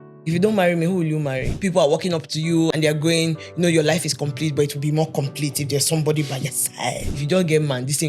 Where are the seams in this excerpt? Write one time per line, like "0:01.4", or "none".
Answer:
0:01.6
0:02.7
0:07.1